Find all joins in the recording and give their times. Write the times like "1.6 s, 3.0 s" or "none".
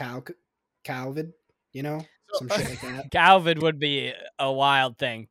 3.2 s

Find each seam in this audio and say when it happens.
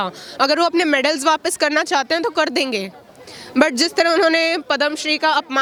none

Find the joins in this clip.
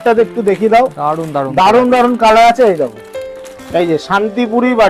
none

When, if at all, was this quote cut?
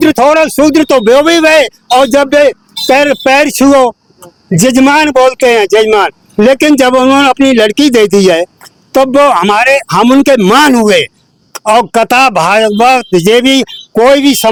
none

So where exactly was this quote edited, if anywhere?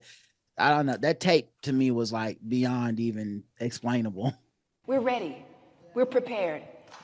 4.8 s

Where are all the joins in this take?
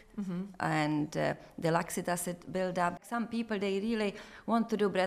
3.1 s

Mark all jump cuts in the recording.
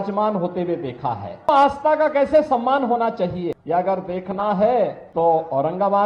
1.5 s, 3.6 s, 5.0 s

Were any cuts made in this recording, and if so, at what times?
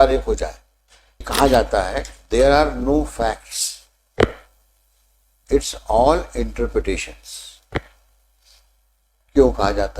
1.3 s

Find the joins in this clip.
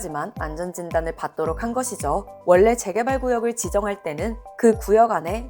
2.3 s

